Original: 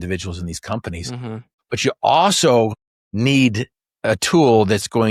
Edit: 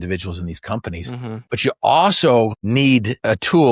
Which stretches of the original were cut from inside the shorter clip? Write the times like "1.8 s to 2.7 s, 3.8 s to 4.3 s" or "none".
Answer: 1.4 s to 1.6 s, 3.1 s to 3.7 s